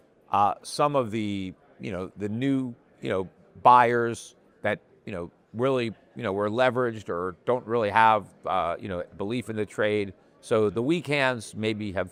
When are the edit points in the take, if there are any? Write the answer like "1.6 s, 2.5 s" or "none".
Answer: none